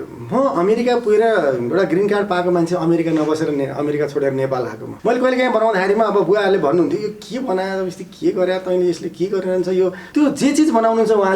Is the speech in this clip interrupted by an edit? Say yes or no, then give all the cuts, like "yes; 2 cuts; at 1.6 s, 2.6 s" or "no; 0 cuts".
yes; 2 cuts; at 4.8 s, 10.0 s